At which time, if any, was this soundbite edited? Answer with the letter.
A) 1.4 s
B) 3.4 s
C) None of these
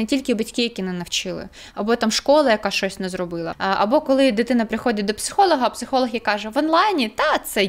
B